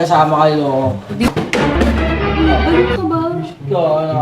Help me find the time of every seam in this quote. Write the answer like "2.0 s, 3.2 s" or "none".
1.3 s